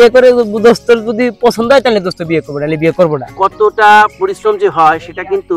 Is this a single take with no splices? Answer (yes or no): no